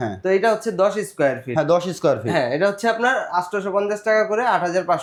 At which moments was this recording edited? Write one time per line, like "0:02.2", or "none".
none